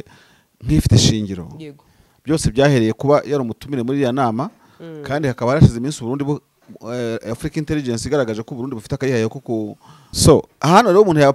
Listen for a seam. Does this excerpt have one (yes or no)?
yes